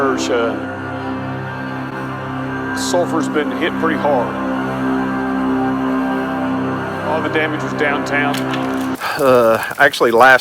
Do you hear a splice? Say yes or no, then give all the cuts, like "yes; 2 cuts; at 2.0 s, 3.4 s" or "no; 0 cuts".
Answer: yes; 1 cut; at 8.9 s